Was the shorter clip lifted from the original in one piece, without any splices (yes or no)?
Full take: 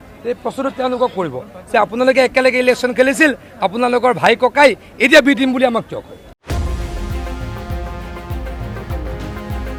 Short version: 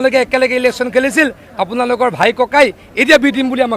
yes